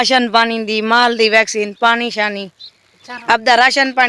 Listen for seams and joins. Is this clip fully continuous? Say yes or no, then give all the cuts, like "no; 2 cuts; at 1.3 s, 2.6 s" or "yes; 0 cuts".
no; 1 cut; at 3.1 s